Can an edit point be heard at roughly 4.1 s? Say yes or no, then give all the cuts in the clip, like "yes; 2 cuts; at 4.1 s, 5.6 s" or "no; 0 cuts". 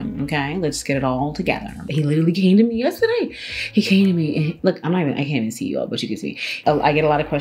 no; 2 cuts; at 1.9 s, 6.5 s